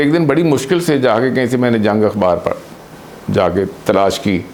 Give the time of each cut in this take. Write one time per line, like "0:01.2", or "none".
none